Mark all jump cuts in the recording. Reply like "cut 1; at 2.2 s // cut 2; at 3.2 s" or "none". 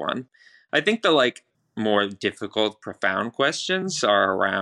cut 1; at 1.5 s